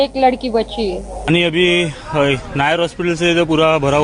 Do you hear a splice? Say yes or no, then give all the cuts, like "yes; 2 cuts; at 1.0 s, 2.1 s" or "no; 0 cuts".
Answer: yes; 1 cut; at 1.1 s